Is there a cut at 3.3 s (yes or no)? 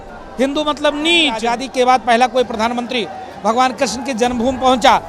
no